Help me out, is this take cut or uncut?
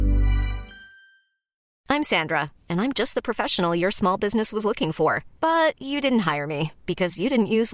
cut